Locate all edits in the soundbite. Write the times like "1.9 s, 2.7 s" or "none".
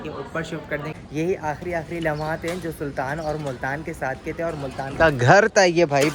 0.9 s